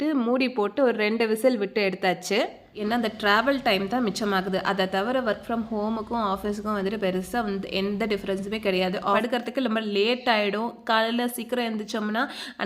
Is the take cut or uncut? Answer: cut